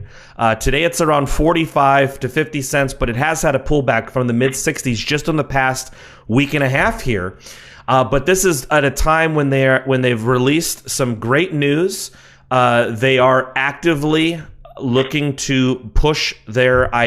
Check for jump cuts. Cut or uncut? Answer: cut